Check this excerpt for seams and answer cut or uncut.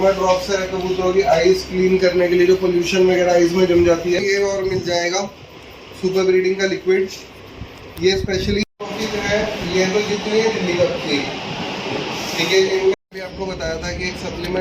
cut